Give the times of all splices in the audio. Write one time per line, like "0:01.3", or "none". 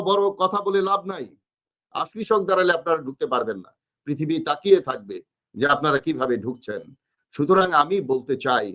0:02.0